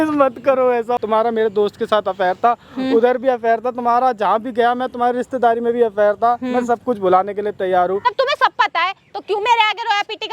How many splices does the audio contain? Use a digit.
2